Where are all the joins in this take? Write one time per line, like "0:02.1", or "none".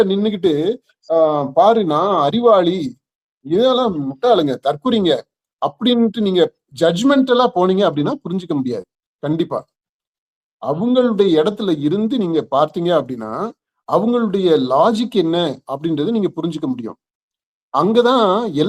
none